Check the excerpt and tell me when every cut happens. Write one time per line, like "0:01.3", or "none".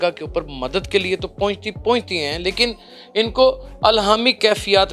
none